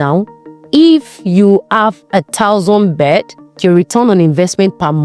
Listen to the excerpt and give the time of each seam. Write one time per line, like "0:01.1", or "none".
0:03.6

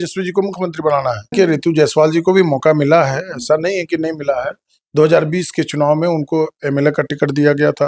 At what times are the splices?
0:01.3

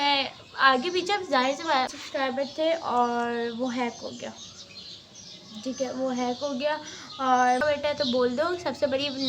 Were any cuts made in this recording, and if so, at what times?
0:01.9
0:07.6

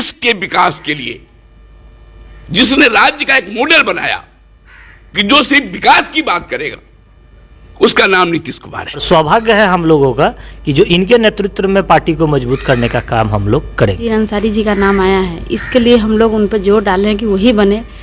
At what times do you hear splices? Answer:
0:09.0
0:14.1

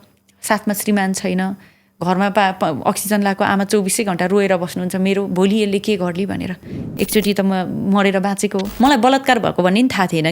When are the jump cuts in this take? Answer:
0:08.7

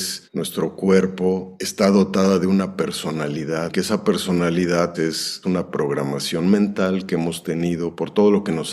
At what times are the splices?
0:03.7
0:04.9

